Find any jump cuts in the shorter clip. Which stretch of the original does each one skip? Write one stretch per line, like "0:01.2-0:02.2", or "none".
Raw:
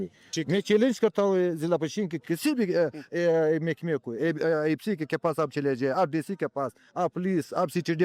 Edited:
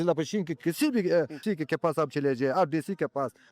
0:03.0-0:04.8